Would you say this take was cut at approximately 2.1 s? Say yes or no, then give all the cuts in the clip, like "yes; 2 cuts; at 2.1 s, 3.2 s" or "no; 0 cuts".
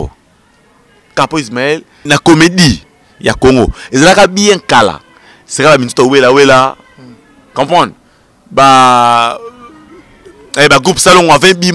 yes; 1 cut; at 2.1 s